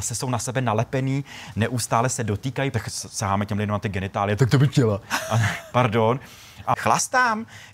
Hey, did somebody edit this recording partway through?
yes; 3 cuts; at 2.7 s, 5.1 s, 6.8 s

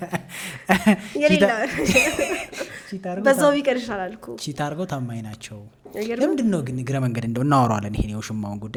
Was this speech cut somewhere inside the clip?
no; 0 cuts

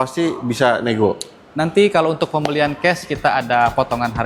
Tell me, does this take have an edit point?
no; 0 cuts

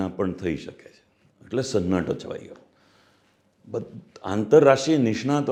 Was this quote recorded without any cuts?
yes; 0 cuts

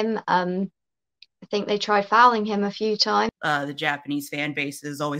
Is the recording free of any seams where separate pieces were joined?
no; 1 cut; at 3.3 s

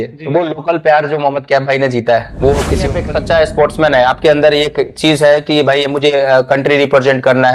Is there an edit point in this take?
yes; 1 cut; at 3.0 s

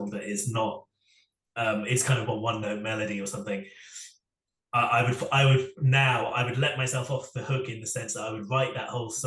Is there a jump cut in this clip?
no; 0 cuts

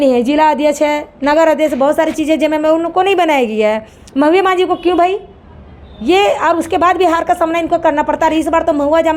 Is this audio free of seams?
yes; 0 cuts

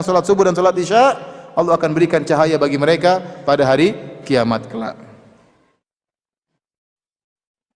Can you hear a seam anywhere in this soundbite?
no; 0 cuts

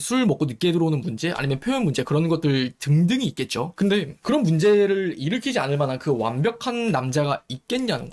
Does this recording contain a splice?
no; 0 cuts

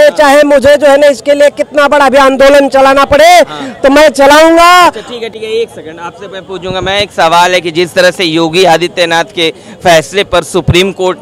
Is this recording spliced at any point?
no; 0 cuts

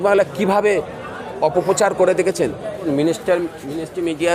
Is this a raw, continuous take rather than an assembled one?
no; 1 cut; at 2.8 s

